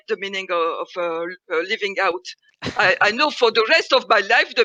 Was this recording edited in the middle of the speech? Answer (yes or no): no